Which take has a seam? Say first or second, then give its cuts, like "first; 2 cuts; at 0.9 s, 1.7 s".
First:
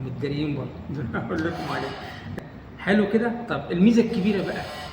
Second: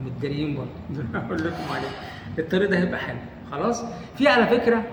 first; 1 cut; at 2.3 s